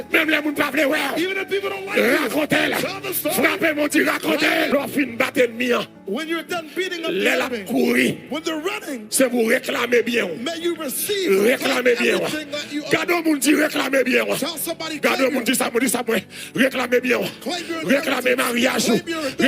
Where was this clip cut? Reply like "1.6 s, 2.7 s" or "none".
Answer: 4.7 s

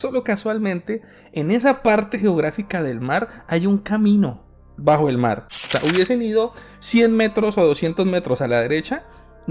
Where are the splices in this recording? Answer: 5.7 s

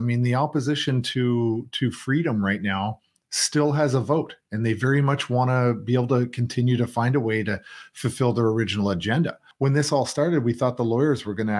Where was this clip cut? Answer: 9.5 s

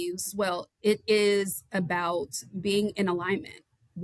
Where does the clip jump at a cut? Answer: none

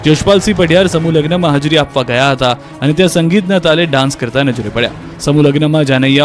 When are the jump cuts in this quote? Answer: 5.1 s

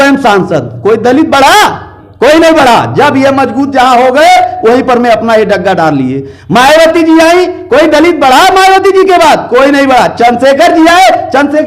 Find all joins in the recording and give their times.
none

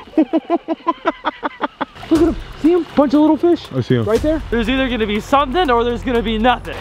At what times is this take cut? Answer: 1.9 s, 4.5 s

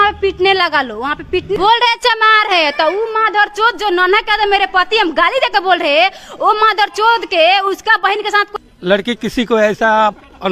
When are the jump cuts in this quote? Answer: 1.6 s, 8.5 s

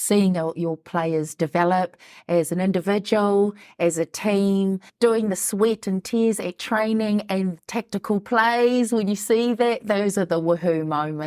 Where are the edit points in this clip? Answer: 7.5 s

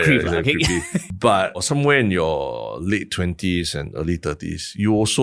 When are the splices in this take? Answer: 1.0 s, 1.6 s

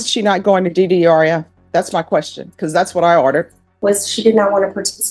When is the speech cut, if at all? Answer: 3.6 s

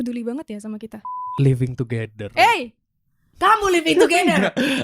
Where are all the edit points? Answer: 1.2 s

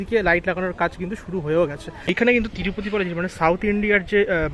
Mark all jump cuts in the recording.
2.1 s

